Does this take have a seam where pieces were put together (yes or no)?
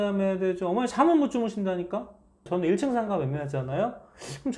yes